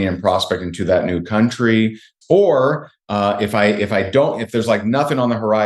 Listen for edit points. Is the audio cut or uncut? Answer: cut